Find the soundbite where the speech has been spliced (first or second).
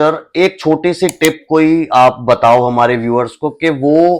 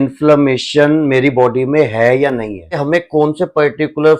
second